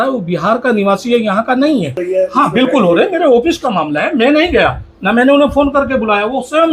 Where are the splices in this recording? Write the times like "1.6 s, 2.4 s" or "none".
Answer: 2.0 s